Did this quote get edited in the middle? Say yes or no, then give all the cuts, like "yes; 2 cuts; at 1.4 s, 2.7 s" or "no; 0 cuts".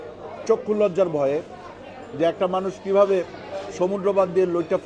no; 0 cuts